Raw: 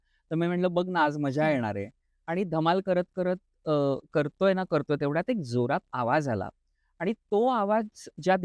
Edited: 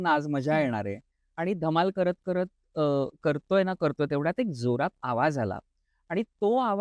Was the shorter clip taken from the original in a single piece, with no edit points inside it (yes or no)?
yes